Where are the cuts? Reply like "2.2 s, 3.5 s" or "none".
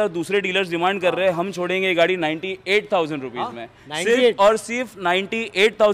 none